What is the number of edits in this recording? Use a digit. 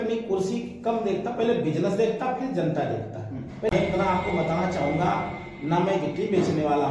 1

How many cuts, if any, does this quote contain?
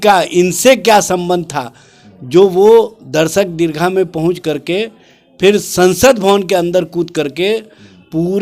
0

